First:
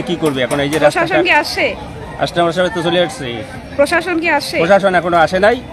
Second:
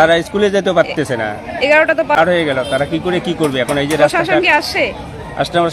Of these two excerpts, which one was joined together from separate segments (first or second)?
second